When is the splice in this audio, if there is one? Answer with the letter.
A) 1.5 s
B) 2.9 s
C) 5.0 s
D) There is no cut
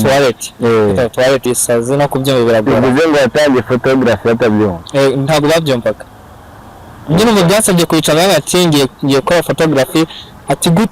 A